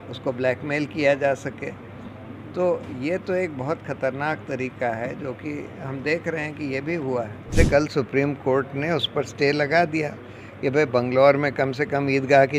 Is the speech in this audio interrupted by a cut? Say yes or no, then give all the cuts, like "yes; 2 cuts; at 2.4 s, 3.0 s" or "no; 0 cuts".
yes; 1 cut; at 7.5 s